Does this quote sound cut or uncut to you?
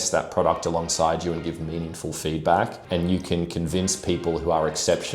cut